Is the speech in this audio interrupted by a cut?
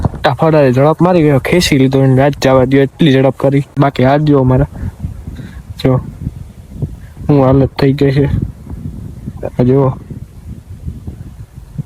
yes; 1 cut; at 3.8 s

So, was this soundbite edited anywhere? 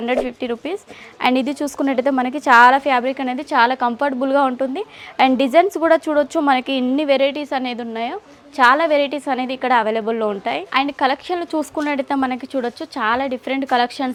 no; 0 cuts

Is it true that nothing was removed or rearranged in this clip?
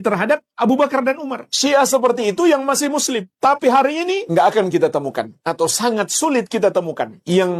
yes; 0 cuts

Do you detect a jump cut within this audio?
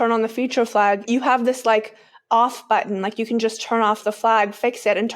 yes; 1 cut; at 1.0 s

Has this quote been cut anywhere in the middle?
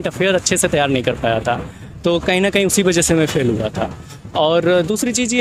no; 0 cuts

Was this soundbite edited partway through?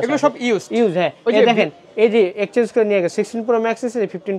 no; 0 cuts

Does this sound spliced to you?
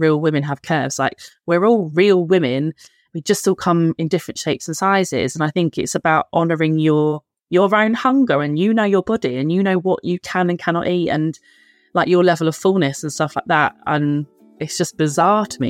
yes; 1 cut; at 14.6 s

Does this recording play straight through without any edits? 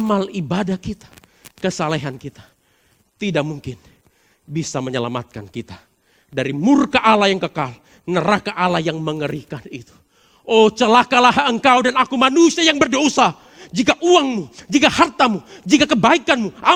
yes; 0 cuts

